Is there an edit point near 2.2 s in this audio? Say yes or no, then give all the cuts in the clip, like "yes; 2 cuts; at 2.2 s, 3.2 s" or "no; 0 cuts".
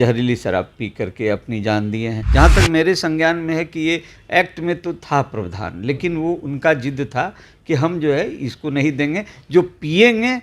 yes; 1 cut; at 2.2 s